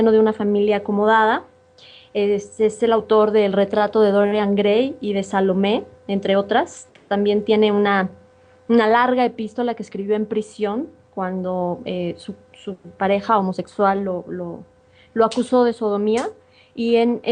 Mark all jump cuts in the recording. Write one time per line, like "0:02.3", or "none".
none